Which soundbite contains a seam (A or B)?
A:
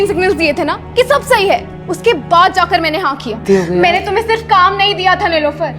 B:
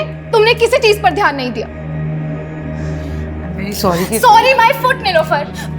A